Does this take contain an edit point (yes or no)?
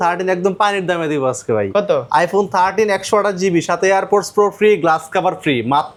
no